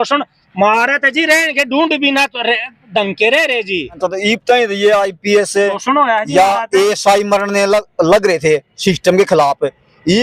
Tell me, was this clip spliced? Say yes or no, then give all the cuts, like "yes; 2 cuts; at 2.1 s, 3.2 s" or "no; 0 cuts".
yes; 1 cut; at 4.0 s